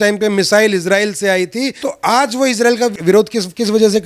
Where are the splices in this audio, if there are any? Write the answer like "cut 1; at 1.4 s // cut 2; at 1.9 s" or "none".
cut 1; at 1.8 s // cut 2; at 3.0 s

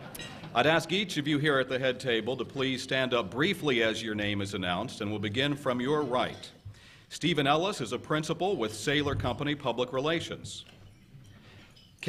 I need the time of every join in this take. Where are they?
none

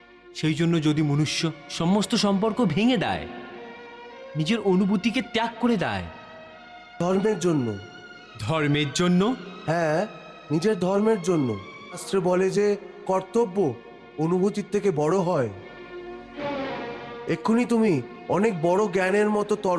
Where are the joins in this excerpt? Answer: cut 1; at 7.0 s // cut 2; at 12.0 s

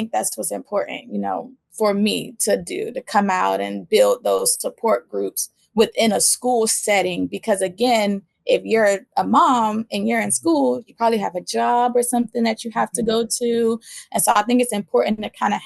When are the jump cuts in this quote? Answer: none

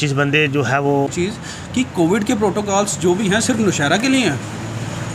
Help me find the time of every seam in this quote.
cut 1; at 1.1 s

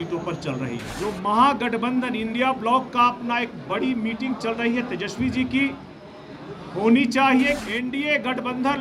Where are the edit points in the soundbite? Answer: cut 1; at 0.9 s // cut 2; at 7.6 s

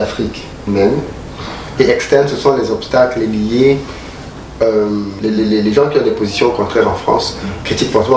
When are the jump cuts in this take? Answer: cut 1; at 5.1 s

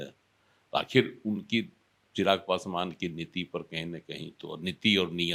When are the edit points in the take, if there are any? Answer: none

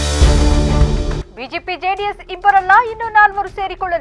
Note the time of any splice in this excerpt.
cut 1; at 1.2 s

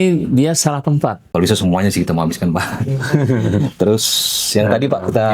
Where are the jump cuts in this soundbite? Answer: cut 1; at 1.3 s

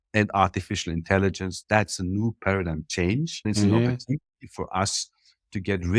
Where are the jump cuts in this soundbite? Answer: none

